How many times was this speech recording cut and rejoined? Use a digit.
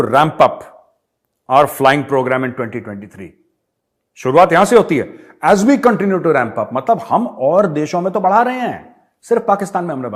0